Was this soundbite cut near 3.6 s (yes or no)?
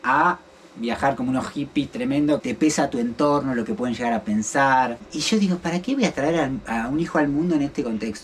no